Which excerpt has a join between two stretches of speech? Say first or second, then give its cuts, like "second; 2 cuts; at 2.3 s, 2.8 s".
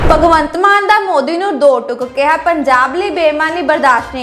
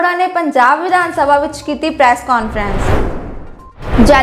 second; 1 cut; at 2.7 s